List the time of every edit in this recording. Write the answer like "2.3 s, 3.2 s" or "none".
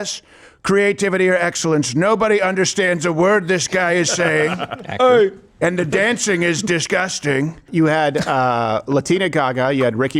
7.6 s